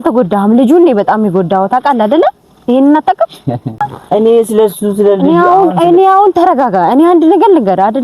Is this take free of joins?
no; 1 cut; at 3.9 s

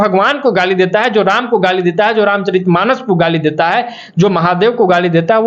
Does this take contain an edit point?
no; 0 cuts

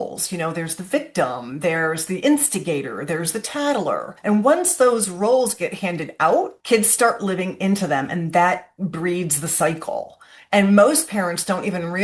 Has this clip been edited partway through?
yes; 2 cuts; at 4.1 s, 6.6 s

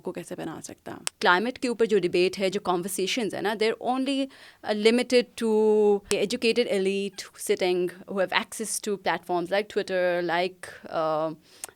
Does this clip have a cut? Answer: yes; 2 cuts; at 1.0 s, 6.1 s

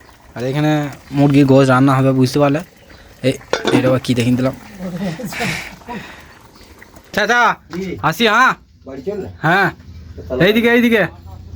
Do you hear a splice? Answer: yes; 1 cut; at 7.1 s

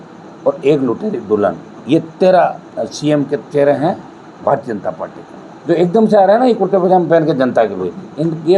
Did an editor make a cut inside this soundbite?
no; 0 cuts

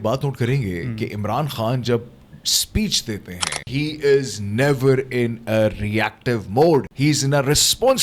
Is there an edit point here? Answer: yes; 2 cuts; at 3.6 s, 6.9 s

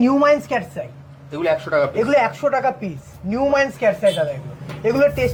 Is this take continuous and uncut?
yes; 0 cuts

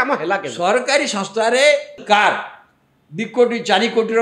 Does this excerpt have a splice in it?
yes; 1 cut; at 2.0 s

